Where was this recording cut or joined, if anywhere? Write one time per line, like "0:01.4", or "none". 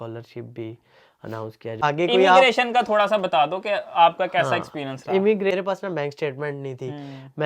0:01.8
0:05.5